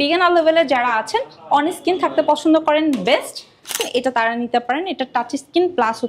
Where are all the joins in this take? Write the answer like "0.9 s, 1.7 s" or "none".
3.9 s

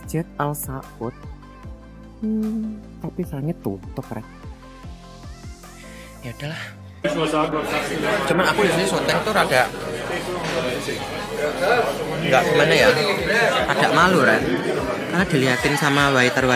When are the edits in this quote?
7.0 s

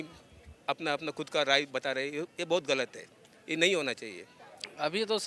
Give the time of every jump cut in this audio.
4.3 s

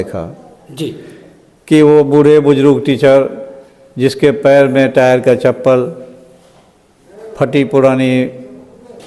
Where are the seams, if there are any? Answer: none

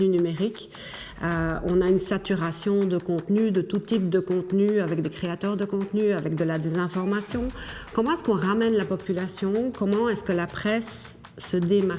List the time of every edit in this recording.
none

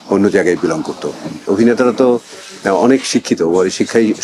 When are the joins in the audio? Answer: 1.4 s

